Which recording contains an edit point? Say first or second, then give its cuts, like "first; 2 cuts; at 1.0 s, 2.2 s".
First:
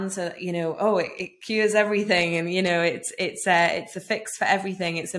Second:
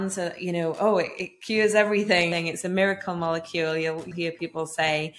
second; 2 cuts; at 2.3 s, 4.1 s